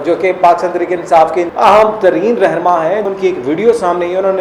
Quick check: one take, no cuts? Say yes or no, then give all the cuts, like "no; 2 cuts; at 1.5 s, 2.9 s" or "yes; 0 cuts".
no; 2 cuts; at 1.4 s, 3.1 s